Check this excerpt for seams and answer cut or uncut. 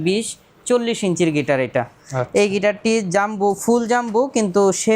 uncut